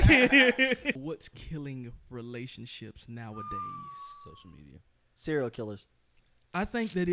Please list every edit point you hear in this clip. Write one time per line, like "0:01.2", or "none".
0:01.0